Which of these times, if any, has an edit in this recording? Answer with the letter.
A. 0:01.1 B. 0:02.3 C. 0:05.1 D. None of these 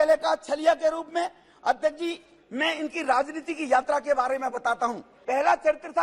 C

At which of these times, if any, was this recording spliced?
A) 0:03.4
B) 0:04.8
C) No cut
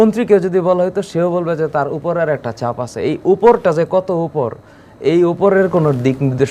C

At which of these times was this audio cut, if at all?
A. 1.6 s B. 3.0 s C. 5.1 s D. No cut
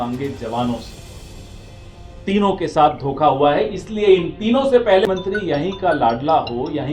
C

